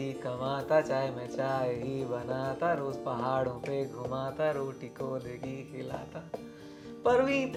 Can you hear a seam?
no; 0 cuts

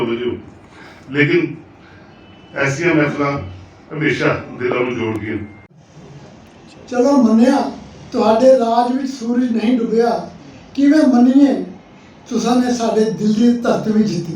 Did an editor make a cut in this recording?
yes; 1 cut; at 5.6 s

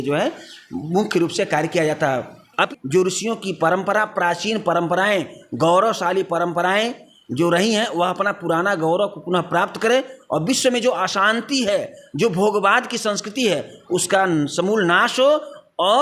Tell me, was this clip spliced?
yes; 1 cut; at 2.7 s

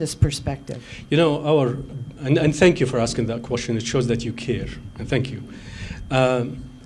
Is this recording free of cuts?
yes; 0 cuts

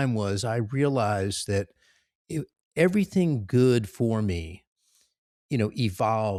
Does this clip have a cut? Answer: no; 0 cuts

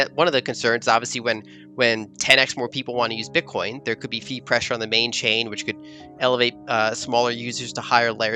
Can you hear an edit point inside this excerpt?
no; 0 cuts

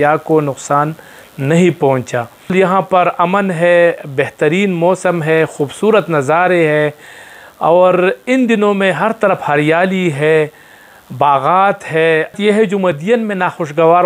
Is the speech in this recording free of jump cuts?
no; 2 cuts; at 2.5 s, 12.4 s

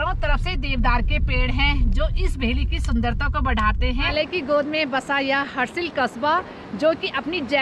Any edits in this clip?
yes; 1 cut; at 4.1 s

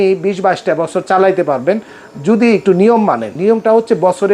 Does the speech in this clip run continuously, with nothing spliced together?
no; 1 cut; at 3.3 s

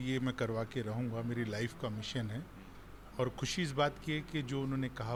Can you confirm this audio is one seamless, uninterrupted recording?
yes; 0 cuts

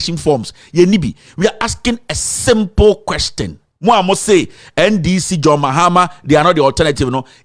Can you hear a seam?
no; 0 cuts

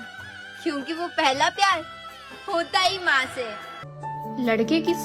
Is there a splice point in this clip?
yes; 1 cut; at 4.0 s

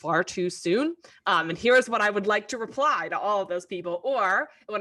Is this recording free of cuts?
yes; 0 cuts

